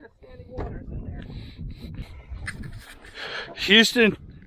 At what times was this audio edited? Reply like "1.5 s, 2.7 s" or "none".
2.1 s